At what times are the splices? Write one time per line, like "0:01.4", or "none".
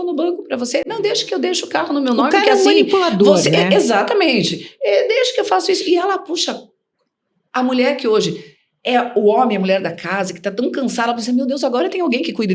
none

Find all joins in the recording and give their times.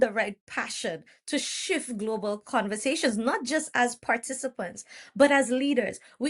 none

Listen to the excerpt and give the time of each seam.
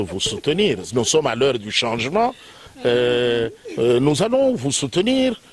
none

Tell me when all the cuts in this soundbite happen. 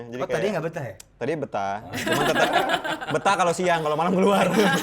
none

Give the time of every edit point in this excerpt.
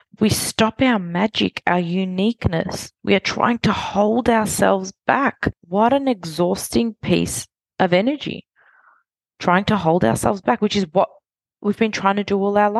0:05.5

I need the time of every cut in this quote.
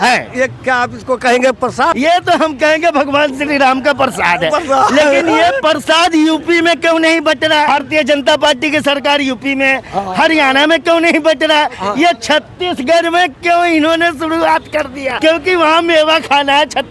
0:01.9
0:07.7
0:15.1

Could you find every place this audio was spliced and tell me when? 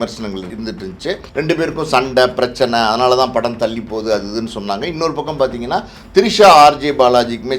0:00.9

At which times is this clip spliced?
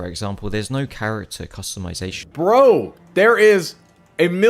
0:02.2

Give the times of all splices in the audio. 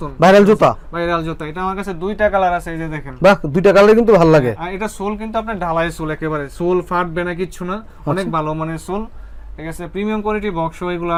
none

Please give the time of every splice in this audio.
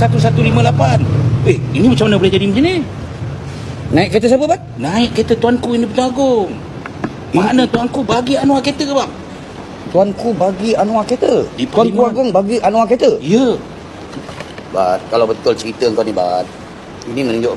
none

